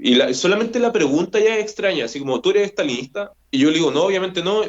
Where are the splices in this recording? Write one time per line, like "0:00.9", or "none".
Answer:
0:03.4

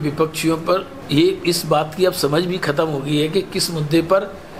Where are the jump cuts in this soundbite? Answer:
0:01.0

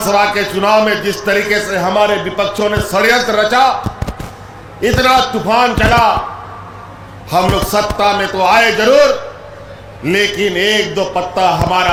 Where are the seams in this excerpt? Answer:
none

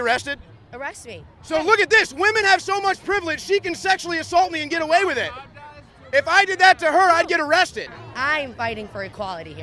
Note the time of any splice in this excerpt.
0:01.4
0:08.0

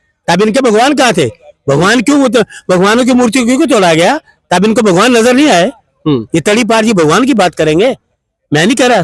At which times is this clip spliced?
none

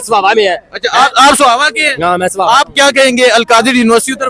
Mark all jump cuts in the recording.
none

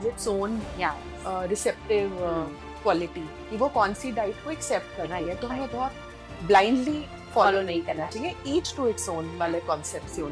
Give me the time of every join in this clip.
none

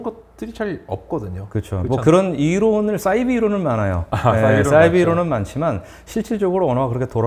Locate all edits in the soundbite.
none

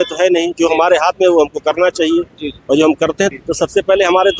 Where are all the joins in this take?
0:03.3

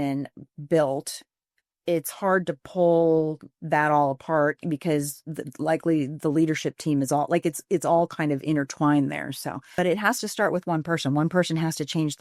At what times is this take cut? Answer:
0:09.8

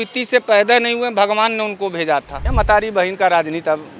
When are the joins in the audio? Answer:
0:02.4

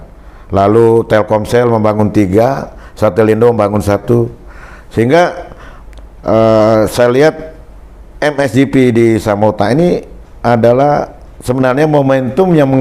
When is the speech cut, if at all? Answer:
none

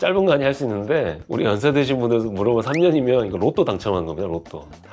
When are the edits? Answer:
none

